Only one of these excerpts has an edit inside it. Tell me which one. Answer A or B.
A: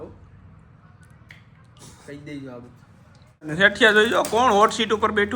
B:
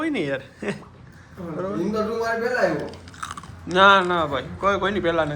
A